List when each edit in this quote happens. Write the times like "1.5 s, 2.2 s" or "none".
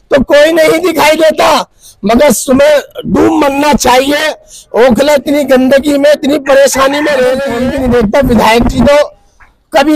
7.5 s